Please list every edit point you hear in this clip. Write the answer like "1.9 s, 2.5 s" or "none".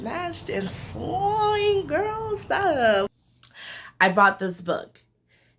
3.1 s